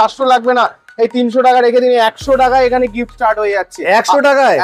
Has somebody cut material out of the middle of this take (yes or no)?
no